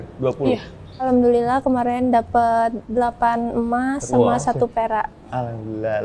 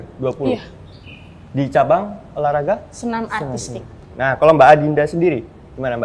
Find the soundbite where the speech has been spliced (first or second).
first